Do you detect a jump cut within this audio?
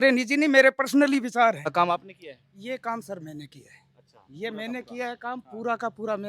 yes; 1 cut; at 1.7 s

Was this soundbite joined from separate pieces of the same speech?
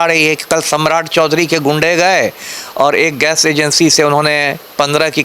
no; 0 cuts

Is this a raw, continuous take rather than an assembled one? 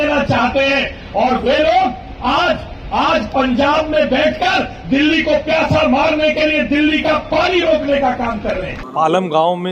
no; 1 cut; at 8.8 s

